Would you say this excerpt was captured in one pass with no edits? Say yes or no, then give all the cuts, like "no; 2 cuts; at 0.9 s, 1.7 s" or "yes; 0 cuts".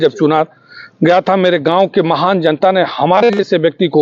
yes; 0 cuts